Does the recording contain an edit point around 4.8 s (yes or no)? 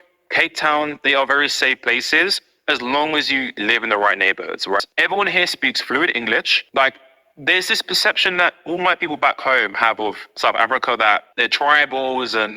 yes